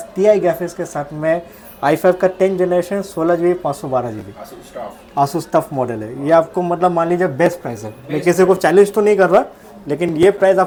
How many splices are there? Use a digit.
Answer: 0